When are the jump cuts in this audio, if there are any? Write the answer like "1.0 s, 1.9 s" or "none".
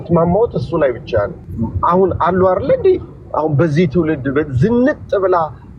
1.5 s